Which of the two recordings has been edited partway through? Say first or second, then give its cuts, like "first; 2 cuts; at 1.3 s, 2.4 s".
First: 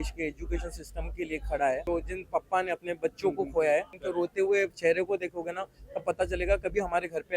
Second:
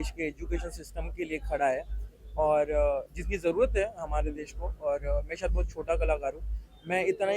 first; 2 cuts; at 1.8 s, 4.0 s